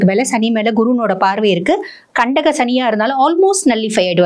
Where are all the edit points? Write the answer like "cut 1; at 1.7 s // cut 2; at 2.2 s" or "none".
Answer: none